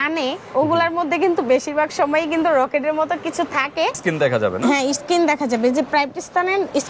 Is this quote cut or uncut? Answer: cut